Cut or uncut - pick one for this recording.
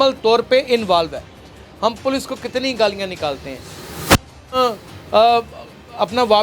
uncut